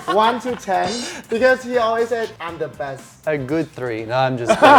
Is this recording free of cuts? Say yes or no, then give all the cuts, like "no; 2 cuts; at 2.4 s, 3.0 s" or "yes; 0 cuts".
no; 1 cut; at 3.2 s